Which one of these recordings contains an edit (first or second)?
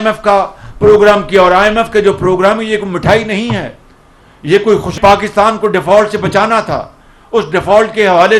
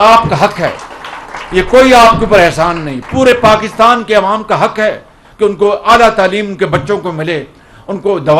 first